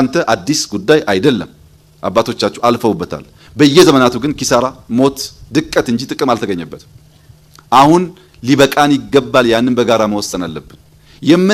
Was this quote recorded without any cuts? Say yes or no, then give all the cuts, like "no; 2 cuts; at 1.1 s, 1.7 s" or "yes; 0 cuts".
yes; 0 cuts